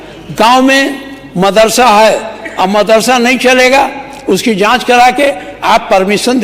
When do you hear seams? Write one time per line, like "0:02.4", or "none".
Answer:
none